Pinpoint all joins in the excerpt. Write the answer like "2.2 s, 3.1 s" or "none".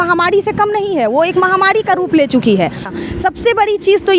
2.9 s